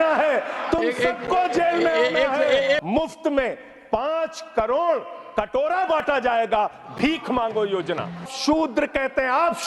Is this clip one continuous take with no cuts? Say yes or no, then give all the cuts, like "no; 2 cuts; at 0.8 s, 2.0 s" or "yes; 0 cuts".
no; 2 cuts; at 2.8 s, 8.3 s